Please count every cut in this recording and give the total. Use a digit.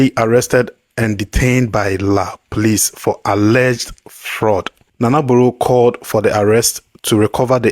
1